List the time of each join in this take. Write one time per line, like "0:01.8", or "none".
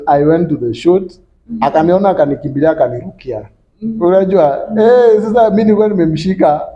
none